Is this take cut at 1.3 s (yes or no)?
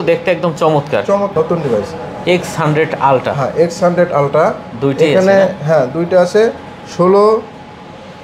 yes